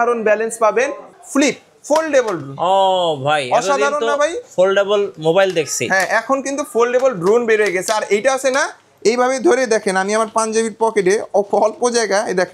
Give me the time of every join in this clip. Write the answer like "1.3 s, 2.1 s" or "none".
1.1 s